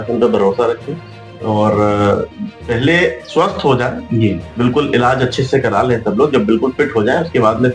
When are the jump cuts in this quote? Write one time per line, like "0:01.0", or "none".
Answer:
none